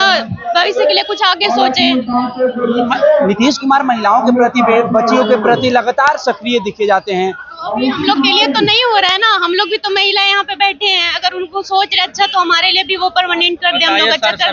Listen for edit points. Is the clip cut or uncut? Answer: uncut